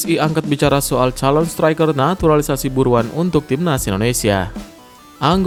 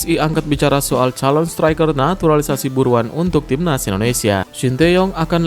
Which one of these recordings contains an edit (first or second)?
second